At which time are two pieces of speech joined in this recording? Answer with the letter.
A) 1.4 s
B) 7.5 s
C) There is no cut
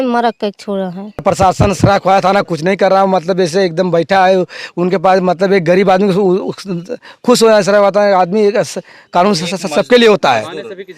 A